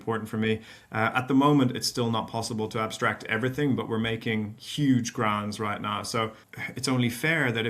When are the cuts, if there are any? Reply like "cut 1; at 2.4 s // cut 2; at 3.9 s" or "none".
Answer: cut 1; at 6.5 s